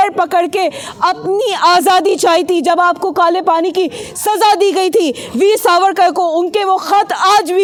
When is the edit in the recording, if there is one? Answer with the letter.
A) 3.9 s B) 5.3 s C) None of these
C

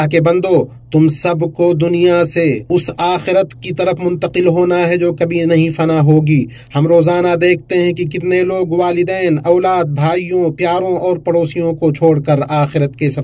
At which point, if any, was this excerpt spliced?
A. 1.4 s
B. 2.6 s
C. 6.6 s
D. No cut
B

